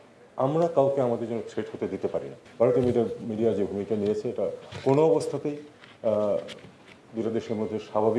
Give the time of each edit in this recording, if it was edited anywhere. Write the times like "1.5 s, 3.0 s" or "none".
2.4 s